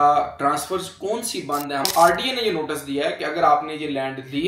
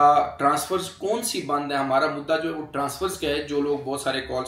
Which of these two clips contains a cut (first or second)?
first